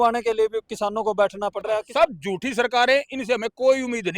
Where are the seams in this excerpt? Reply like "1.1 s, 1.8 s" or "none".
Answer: 1.9 s